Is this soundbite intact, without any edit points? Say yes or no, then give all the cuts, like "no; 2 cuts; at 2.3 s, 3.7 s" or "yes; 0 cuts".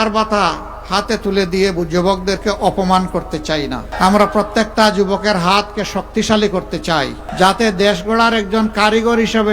no; 2 cuts; at 3.9 s, 7.2 s